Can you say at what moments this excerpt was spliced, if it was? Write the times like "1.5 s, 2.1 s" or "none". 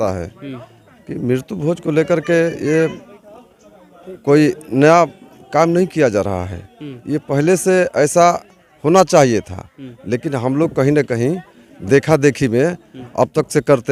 none